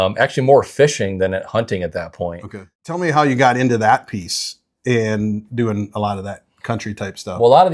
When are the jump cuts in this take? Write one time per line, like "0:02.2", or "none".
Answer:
0:02.7